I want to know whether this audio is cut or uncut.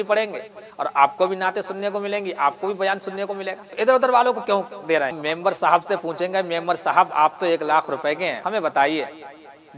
cut